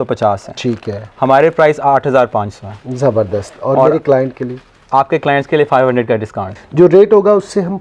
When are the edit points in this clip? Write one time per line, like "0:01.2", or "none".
0:06.5